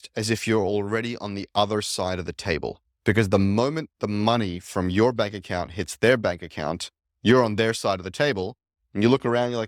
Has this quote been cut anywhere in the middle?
no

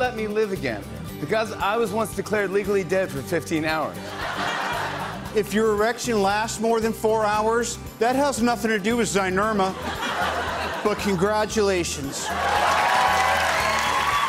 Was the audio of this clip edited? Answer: no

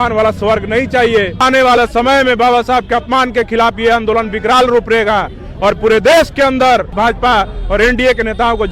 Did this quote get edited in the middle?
yes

